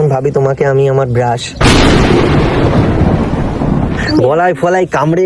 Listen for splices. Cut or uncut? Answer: cut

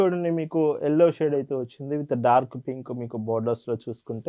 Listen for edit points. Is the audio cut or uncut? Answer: uncut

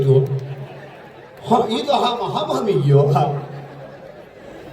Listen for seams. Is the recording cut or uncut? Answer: uncut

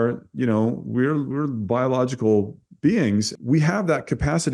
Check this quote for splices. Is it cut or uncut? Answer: cut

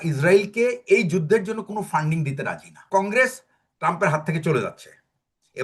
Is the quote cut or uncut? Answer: cut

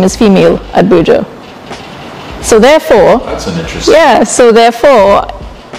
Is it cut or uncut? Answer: uncut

